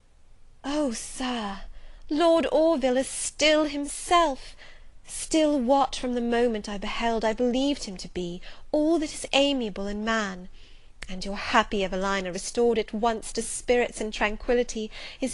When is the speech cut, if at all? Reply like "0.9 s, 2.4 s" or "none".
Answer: none